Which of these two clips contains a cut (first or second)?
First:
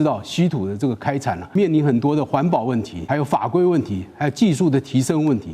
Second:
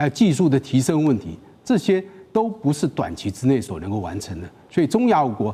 first